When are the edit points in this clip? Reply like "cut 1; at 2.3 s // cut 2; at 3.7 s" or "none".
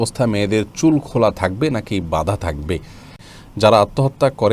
cut 1; at 3.3 s